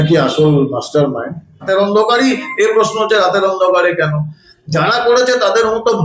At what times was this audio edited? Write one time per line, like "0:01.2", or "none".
0:01.6